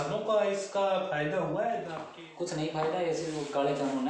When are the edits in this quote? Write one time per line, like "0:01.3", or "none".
0:02.0